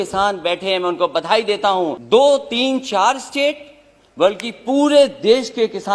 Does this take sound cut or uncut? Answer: cut